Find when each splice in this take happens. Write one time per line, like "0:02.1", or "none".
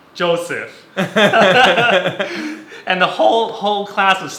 none